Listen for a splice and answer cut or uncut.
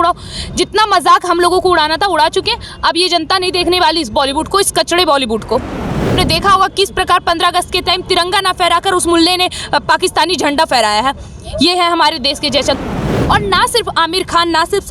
cut